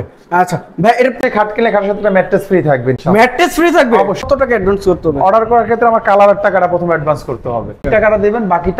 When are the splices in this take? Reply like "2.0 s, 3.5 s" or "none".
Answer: 1.2 s, 4.3 s, 7.9 s